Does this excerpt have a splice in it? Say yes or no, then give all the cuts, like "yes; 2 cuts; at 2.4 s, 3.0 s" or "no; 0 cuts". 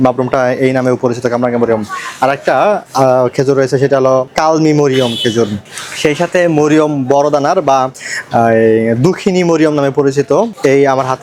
no; 0 cuts